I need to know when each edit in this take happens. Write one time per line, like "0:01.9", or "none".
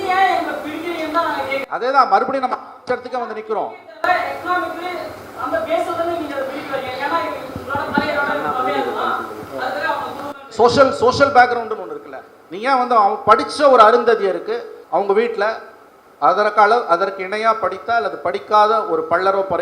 0:14.7